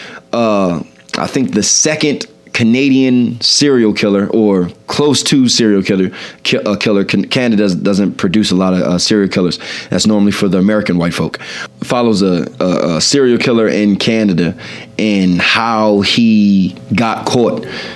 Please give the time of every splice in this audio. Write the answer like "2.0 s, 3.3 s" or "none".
11.6 s